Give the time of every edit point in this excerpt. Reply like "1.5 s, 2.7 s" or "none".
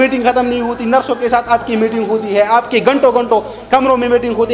none